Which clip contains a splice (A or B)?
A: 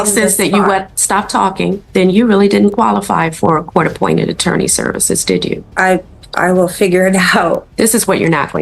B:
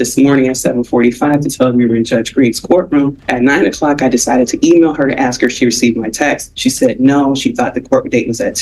A